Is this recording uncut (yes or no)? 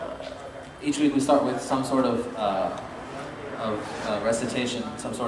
no